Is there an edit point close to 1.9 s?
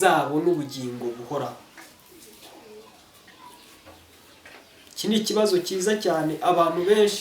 no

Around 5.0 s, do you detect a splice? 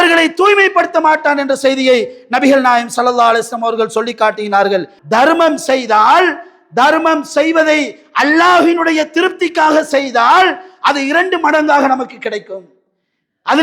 yes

